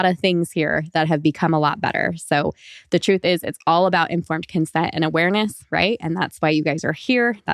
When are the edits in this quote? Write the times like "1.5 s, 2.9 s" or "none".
none